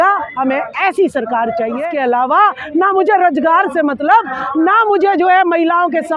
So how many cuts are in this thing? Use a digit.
1